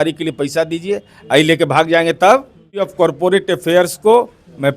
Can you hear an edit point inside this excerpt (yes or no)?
yes